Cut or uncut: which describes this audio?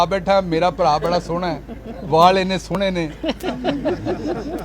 uncut